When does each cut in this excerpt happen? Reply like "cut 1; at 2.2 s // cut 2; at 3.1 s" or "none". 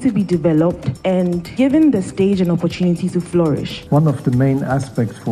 cut 1; at 1.2 s // cut 2; at 3.7 s